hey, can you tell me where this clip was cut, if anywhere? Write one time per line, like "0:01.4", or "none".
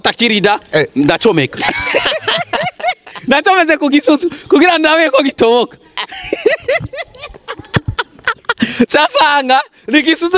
none